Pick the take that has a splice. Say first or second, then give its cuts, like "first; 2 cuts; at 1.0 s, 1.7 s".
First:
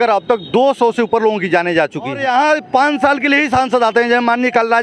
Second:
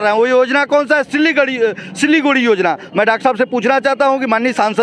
first; 1 cut; at 2.2 s